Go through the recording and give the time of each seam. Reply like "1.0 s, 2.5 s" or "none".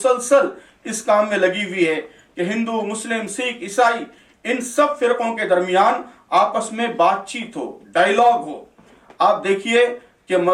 none